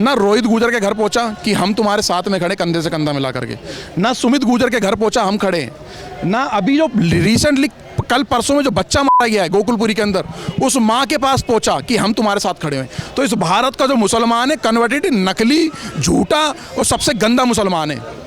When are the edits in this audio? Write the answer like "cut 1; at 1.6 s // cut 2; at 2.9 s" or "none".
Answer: none